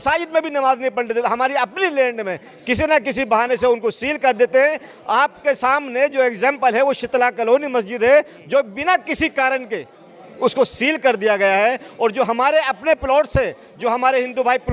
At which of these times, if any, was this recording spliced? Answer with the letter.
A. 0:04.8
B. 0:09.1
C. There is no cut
C